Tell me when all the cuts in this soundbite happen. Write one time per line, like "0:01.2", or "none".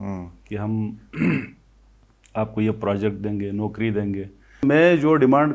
0:04.6

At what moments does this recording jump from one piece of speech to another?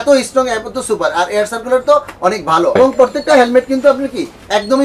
0:02.8

